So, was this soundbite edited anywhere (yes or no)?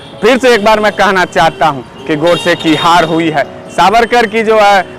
no